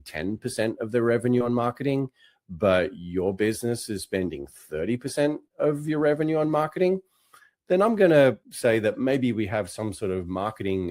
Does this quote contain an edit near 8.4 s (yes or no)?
yes